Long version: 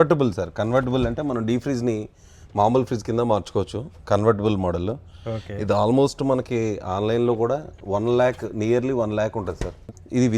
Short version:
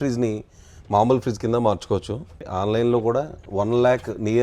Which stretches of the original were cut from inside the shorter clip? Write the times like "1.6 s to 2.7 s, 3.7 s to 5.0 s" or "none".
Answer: 4.0 s to 6.7 s